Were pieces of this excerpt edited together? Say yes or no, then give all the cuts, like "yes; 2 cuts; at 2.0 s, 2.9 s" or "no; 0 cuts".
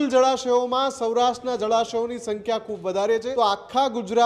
yes; 1 cut; at 3.3 s